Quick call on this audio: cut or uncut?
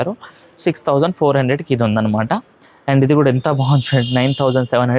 uncut